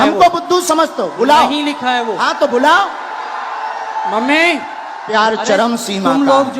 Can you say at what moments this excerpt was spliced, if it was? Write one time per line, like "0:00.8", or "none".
0:05.1